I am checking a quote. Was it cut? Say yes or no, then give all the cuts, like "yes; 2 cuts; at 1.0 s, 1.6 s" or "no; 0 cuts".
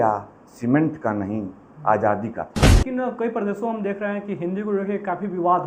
yes; 1 cut; at 2.8 s